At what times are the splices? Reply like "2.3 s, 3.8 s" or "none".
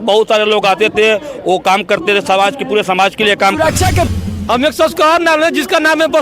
4.1 s